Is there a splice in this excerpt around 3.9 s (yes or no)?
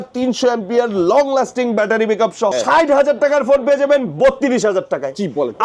no